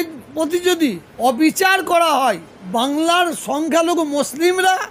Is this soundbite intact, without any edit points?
no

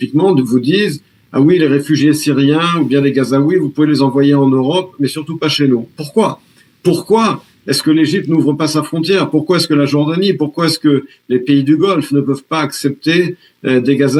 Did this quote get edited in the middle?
no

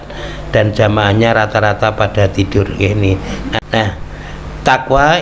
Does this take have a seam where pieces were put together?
yes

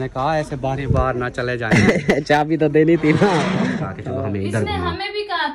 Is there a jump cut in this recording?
yes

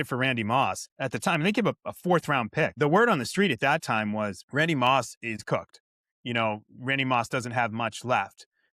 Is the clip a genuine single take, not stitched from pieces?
no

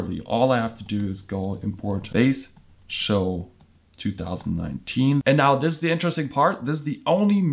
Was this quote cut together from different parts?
yes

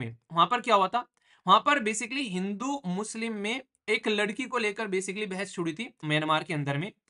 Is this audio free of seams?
no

